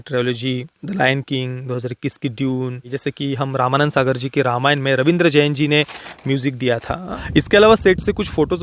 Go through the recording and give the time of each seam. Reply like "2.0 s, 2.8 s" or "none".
3.0 s, 7.1 s